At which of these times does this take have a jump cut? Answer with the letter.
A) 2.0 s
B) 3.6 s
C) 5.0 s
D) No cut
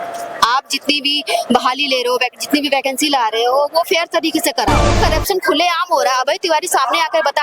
C